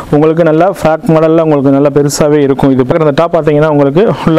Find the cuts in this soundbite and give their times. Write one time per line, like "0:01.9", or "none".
0:02.9